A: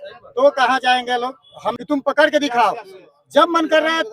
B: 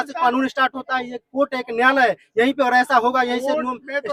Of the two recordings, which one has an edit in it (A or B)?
A